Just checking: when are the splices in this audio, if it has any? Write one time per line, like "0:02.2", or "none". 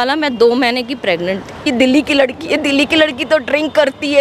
0:01.6